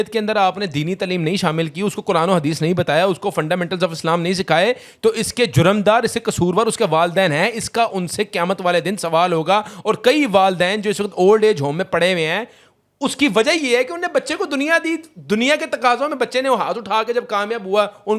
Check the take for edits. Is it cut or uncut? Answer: uncut